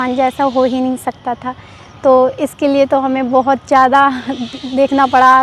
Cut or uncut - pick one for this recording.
uncut